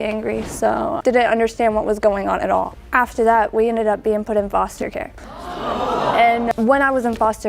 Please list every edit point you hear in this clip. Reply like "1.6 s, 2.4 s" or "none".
6.5 s